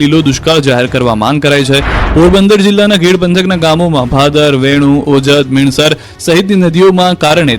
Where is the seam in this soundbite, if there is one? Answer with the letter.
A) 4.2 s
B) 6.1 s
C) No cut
B